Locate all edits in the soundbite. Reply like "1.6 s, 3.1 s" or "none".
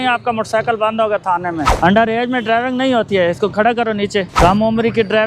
1.7 s, 4.3 s